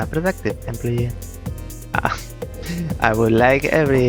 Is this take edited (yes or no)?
no